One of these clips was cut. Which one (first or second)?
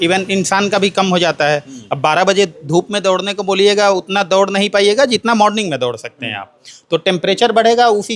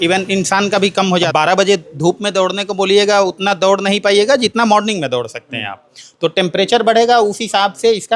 second